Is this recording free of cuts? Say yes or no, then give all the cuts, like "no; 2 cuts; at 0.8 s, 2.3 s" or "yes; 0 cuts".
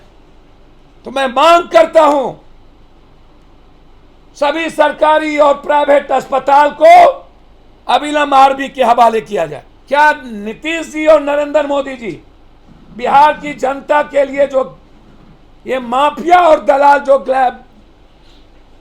no; 1 cut; at 9.7 s